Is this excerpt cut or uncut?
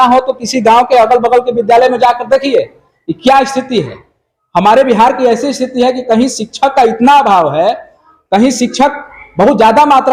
uncut